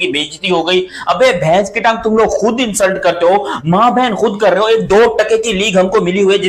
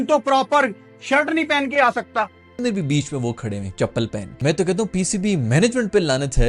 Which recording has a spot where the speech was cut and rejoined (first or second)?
second